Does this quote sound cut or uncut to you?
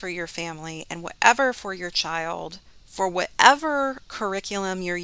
uncut